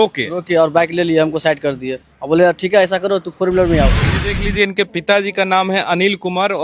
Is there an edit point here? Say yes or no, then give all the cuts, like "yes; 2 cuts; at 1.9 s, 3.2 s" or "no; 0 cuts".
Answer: yes; 1 cut; at 4.1 s